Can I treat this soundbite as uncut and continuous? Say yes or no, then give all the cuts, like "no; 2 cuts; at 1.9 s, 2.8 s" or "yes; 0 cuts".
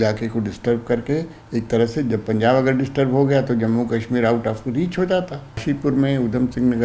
no; 1 cut; at 5.6 s